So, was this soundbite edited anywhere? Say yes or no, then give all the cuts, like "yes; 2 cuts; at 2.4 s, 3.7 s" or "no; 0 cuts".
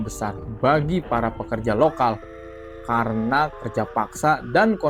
no; 0 cuts